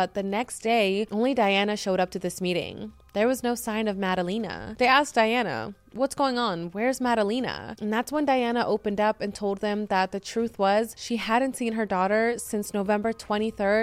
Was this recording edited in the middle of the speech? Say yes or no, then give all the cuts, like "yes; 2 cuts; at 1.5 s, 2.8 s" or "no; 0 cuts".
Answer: yes; 2 cuts; at 4.6 s, 11.0 s